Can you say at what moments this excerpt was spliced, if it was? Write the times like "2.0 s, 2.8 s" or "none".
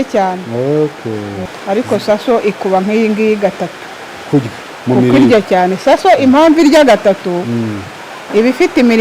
1.4 s